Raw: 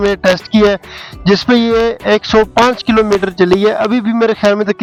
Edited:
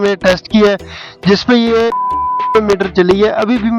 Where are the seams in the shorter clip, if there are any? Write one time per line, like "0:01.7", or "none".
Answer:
0:02.3